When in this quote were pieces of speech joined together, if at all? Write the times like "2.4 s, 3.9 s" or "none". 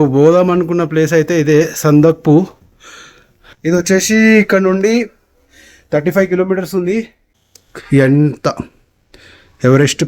7.2 s